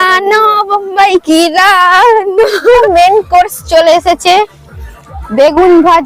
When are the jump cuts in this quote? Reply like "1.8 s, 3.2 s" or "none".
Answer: 2.8 s